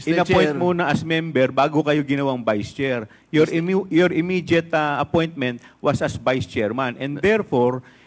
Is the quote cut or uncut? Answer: uncut